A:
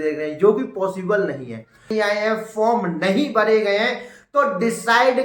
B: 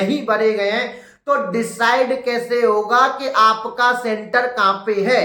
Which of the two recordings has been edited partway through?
A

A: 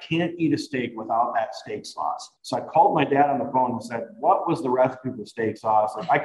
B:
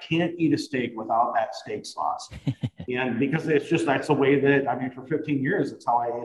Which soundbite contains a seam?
A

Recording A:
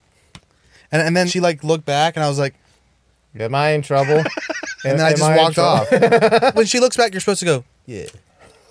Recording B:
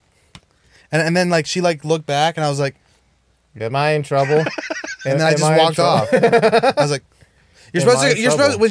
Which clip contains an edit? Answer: A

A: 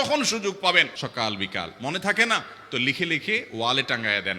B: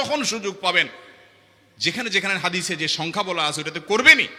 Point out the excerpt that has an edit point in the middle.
A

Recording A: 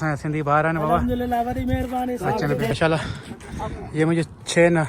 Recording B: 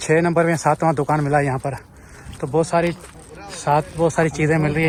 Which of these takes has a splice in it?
A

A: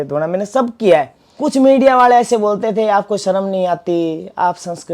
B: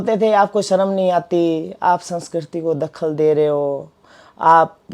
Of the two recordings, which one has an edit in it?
A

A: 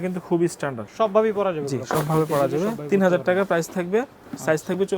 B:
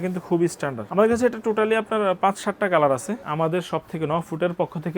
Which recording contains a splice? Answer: B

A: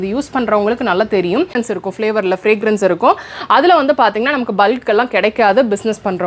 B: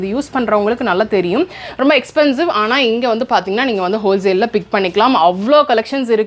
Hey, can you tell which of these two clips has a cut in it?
A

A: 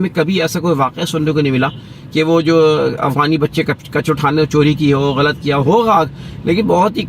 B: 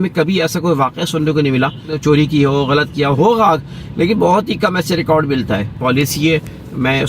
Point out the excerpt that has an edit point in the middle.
B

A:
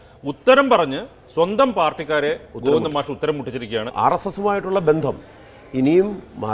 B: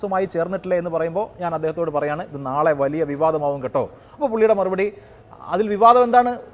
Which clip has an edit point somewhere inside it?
A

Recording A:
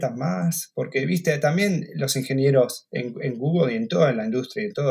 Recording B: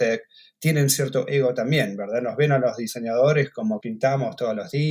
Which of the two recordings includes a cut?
B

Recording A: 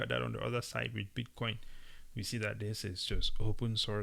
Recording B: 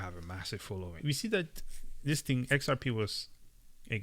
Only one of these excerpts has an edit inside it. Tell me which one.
B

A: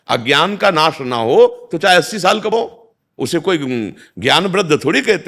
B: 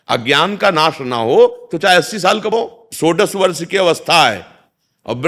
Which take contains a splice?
B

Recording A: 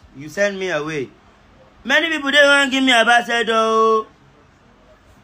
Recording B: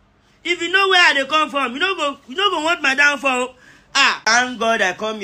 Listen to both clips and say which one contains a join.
B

